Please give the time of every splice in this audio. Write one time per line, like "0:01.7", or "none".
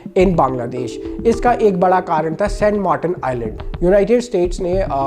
none